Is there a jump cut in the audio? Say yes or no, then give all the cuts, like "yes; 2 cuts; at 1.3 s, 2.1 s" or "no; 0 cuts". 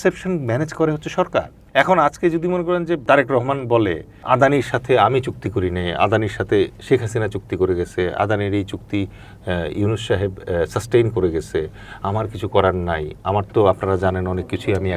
yes; 3 cuts; at 1.6 s, 3.0 s, 4.2 s